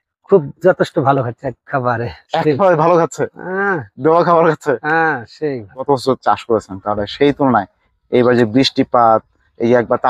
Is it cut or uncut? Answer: cut